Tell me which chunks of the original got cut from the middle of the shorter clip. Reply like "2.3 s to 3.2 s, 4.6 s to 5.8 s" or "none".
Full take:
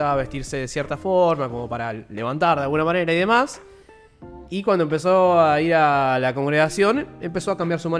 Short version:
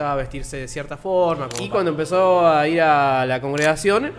1.5 s to 4.5 s